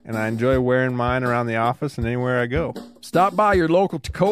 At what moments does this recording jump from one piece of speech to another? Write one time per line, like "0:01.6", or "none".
0:02.9

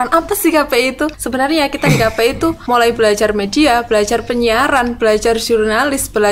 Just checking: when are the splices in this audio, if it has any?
0:01.2
0:02.6

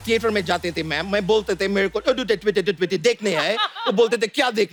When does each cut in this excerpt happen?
none

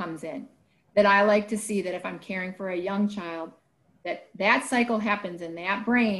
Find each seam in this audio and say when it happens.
none

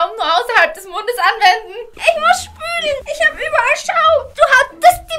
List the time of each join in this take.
0:02.0

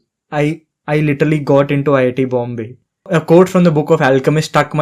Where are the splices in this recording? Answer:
0:03.1

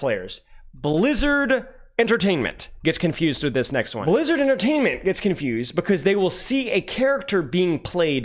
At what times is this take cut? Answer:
0:03.9

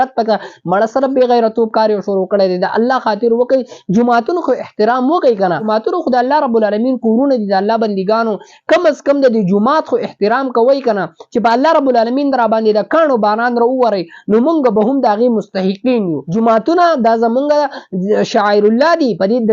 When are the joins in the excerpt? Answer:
0:05.6
0:16.2

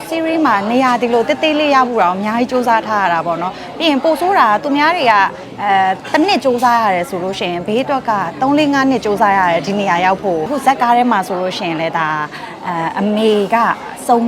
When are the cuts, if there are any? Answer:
0:10.5

